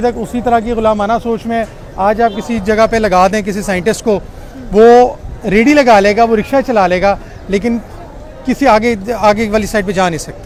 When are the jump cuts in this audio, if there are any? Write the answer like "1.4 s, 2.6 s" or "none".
none

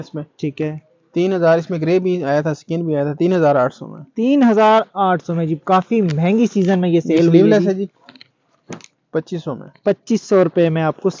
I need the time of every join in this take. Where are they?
none

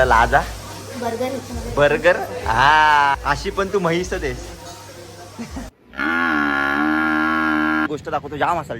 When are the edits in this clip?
3.2 s, 7.9 s

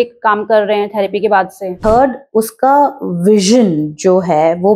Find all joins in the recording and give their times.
1.8 s

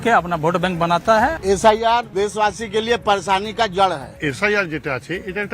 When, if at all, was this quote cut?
1.4 s, 2.1 s, 4.2 s

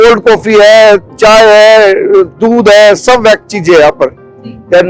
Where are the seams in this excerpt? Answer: none

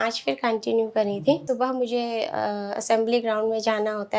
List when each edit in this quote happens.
1.4 s

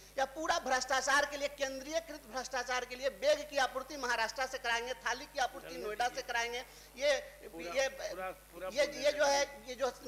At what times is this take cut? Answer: none

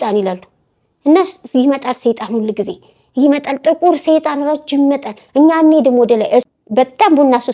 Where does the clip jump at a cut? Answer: 6.5 s

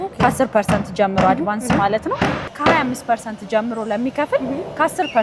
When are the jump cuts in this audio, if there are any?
2.5 s

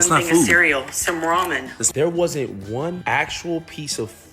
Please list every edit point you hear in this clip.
3.0 s

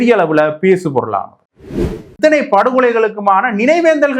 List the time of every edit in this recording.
2.0 s

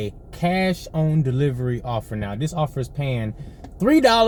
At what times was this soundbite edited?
none

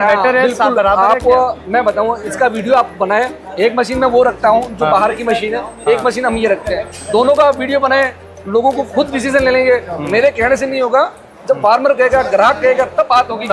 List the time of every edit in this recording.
none

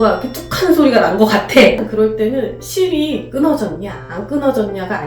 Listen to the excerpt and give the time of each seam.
1.8 s

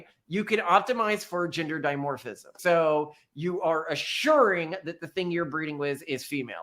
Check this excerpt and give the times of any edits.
2.5 s

